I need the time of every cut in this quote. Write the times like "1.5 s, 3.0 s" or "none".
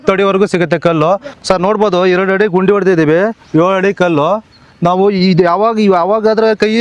none